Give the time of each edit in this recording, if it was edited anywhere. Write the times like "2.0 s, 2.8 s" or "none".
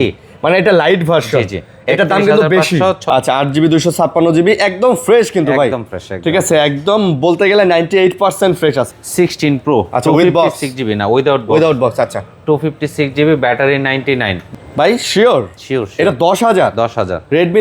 3.0 s, 8.9 s, 14.4 s